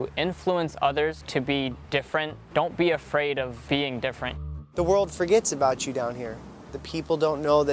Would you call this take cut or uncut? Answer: cut